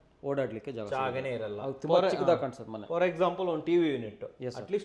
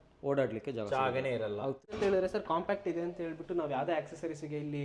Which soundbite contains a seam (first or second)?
second